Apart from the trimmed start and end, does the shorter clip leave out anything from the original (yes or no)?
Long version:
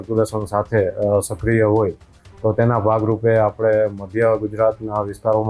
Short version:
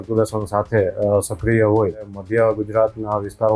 yes